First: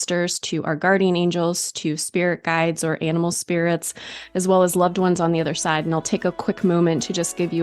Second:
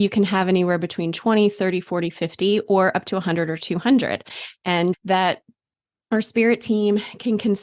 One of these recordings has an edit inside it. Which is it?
second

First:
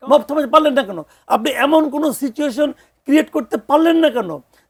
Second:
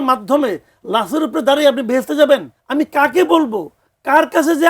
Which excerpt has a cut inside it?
second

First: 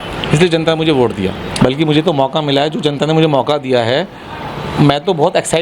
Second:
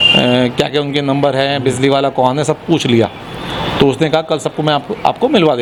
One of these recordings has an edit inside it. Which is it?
first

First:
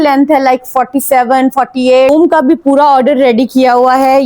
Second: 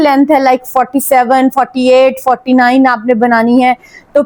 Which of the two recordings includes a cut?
first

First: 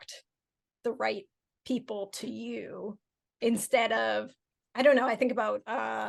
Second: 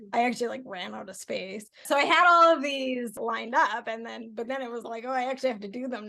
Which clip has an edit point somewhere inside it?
second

